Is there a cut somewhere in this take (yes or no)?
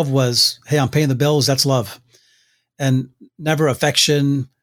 no